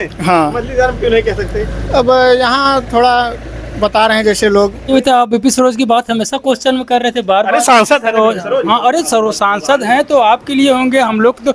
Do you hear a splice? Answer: yes; 1 cut; at 4.9 s

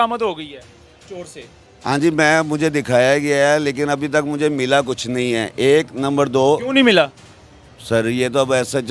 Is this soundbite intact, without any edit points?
yes; 0 cuts

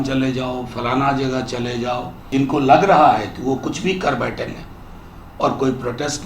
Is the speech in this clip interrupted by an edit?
yes; 1 cut; at 2.1 s

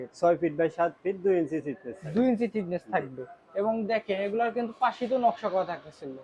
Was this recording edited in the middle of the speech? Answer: no; 0 cuts

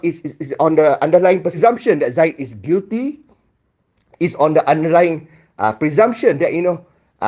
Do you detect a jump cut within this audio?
yes; 1 cut; at 1.6 s

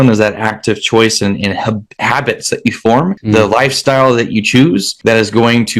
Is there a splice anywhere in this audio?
yes; 2 cuts; at 3.2 s, 4.9 s

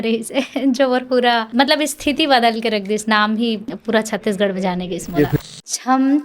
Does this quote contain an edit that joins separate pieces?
yes; 3 cuts; at 1.5 s, 3.7 s, 5.4 s

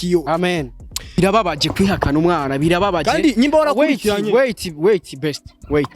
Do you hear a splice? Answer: yes; 1 cut; at 1.2 s

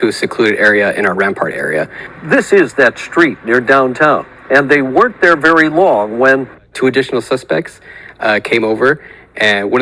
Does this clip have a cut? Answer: no; 0 cuts

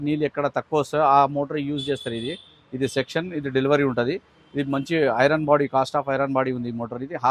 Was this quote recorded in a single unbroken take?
yes; 0 cuts

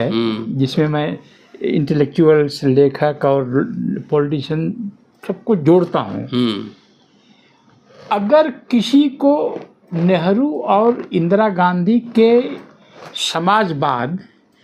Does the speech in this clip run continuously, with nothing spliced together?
yes; 0 cuts

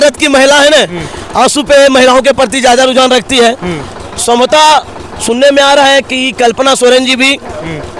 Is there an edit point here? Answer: no; 0 cuts

